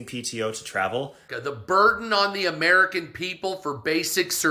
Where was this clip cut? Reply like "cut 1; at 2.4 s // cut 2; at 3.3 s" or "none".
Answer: cut 1; at 1.3 s